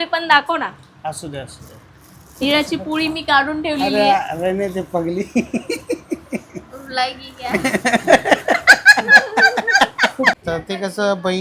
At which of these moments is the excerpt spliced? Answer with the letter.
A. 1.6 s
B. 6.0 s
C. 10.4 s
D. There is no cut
C